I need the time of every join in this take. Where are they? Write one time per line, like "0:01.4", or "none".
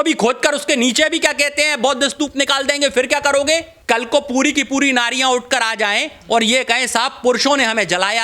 0:03.7